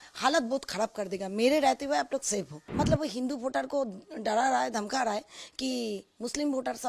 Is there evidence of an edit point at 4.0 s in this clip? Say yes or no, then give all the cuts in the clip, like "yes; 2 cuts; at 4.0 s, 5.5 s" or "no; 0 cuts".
no; 1 cut; at 2.6 s